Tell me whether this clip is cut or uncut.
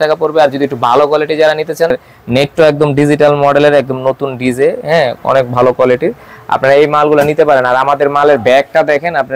cut